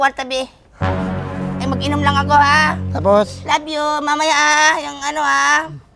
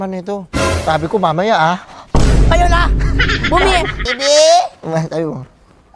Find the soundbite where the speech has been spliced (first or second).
second